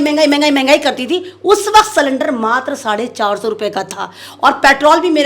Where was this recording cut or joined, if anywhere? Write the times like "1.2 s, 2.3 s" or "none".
none